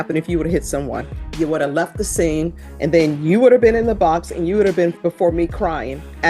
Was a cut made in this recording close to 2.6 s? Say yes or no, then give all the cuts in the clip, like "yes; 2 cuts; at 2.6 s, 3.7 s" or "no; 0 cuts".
yes; 3 cuts; at 1.2 s, 2.6 s, 5.0 s